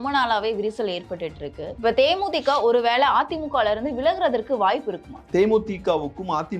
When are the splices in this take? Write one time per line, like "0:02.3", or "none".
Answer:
0:01.6
0:05.2